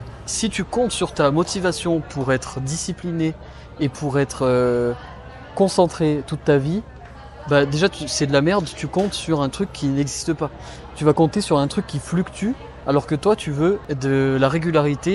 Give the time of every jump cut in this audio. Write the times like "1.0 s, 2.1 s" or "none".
13.9 s